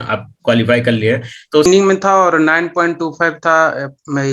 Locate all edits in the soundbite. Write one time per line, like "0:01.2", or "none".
0:01.7